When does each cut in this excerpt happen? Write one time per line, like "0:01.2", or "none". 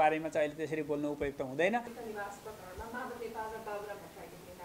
0:01.9